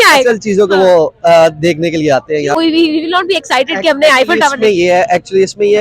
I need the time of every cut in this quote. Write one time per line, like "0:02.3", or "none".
0:02.6